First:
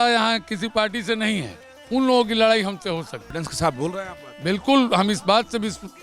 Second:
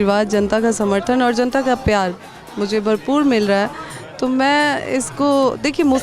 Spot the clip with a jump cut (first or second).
first